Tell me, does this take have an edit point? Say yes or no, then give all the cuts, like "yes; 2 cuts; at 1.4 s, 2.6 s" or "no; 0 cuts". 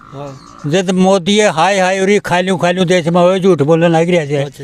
no; 0 cuts